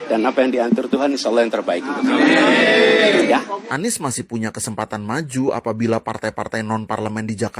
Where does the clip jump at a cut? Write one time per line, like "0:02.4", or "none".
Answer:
0:03.6